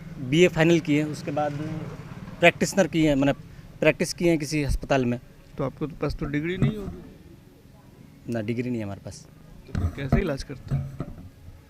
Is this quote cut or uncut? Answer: cut